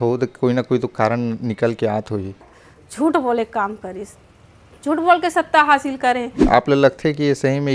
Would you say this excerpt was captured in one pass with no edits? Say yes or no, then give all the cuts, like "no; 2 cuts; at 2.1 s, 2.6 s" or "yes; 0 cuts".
no; 2 cuts; at 2.6 s, 6.4 s